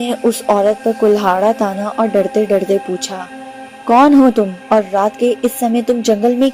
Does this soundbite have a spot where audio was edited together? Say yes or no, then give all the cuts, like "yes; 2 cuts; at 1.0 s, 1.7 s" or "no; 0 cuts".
no; 0 cuts